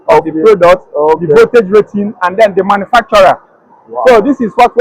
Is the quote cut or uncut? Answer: uncut